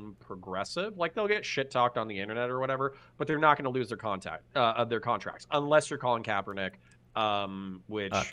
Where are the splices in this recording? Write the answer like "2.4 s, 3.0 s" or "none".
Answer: none